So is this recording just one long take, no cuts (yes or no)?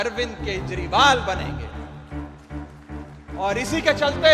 no